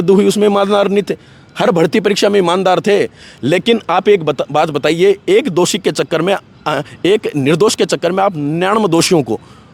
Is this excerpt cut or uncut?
uncut